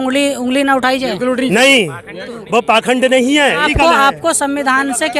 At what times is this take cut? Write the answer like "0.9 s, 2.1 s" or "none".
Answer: 3.6 s